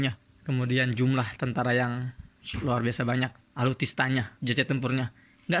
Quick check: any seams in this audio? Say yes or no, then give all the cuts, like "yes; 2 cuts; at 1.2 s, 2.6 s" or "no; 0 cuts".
yes; 2 cuts; at 3.4 s, 4.3 s